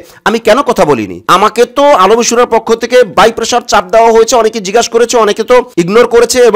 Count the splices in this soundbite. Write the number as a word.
zero